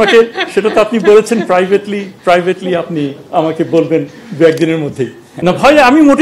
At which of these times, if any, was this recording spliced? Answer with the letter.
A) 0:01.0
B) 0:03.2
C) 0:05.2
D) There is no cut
C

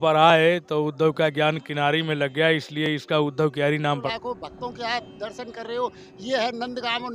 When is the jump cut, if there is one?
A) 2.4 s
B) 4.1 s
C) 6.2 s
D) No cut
B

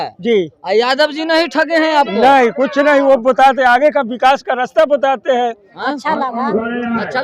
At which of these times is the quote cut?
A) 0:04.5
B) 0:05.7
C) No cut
B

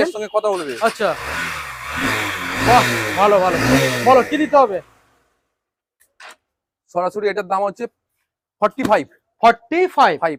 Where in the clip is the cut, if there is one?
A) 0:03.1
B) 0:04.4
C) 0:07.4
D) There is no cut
D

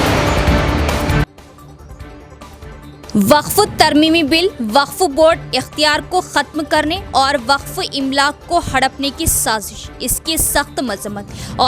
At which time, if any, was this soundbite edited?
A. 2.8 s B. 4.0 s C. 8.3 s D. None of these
A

